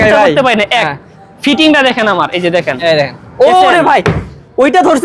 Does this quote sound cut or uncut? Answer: uncut